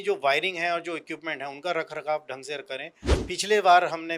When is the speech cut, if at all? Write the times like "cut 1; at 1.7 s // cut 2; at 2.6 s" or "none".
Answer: cut 1; at 3.2 s

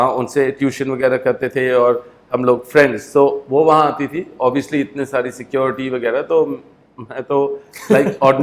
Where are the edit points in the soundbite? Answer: none

